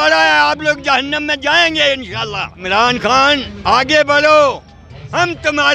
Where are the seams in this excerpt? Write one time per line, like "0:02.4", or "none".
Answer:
0:02.6
0:03.5

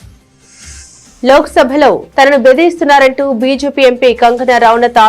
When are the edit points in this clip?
0:01.0

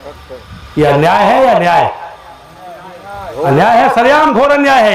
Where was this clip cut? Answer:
none

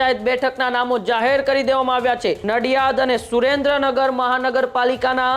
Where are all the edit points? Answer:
0:02.4

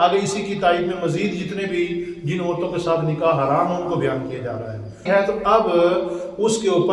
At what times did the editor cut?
0:05.0

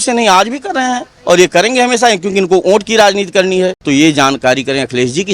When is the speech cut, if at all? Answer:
0:03.8

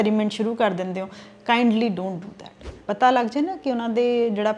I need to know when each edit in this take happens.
0:02.8

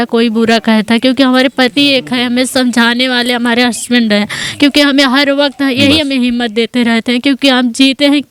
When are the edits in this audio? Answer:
none

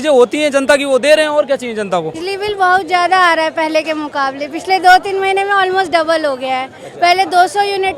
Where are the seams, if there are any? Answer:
0:02.2

